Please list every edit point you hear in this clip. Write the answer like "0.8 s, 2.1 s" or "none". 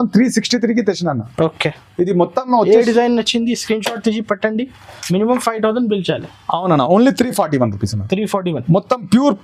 none